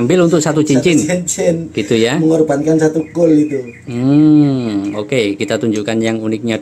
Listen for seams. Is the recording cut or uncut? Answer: uncut